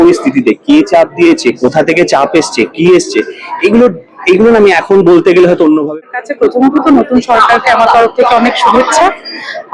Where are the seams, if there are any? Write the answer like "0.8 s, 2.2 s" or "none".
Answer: 5.9 s